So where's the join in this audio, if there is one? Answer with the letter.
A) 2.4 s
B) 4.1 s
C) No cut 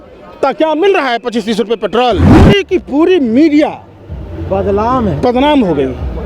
A